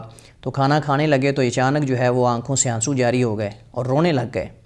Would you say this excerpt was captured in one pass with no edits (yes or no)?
yes